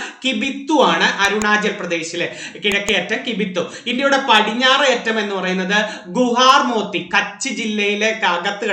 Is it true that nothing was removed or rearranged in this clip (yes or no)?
yes